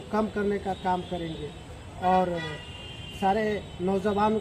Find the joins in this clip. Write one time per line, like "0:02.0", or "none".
none